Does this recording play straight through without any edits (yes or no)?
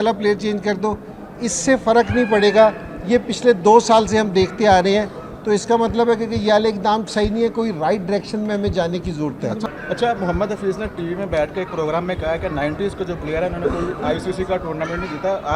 no